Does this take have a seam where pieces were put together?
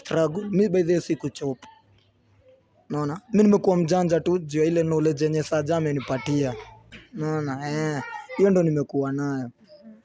no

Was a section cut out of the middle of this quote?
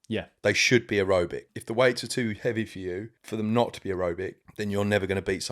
yes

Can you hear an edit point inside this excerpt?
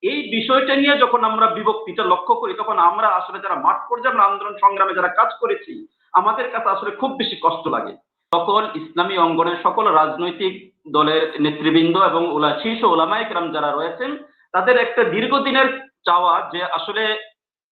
yes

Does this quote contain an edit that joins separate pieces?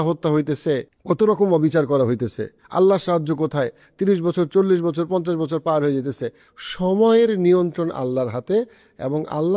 yes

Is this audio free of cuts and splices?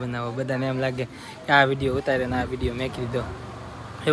yes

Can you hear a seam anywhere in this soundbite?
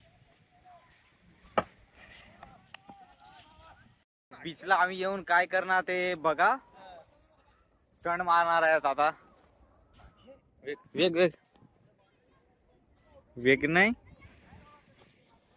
yes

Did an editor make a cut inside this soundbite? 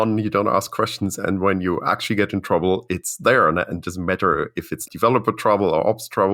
yes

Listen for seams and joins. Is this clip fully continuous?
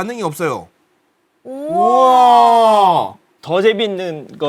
no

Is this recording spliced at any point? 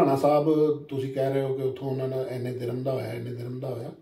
no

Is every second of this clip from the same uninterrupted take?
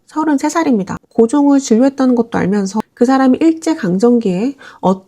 no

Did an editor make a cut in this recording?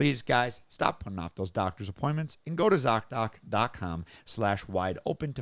no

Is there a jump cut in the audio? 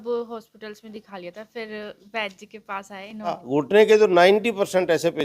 yes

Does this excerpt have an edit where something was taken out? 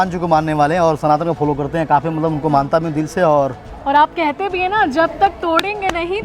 yes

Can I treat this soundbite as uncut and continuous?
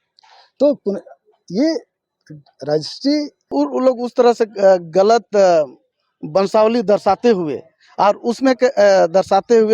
no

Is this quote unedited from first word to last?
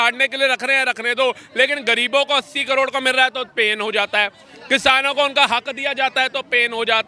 yes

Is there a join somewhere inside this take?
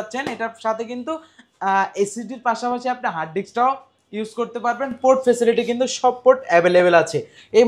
no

